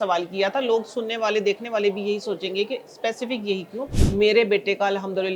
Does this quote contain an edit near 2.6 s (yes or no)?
no